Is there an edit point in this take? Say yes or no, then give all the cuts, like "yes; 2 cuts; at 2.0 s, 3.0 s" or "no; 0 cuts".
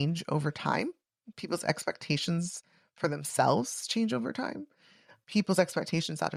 no; 0 cuts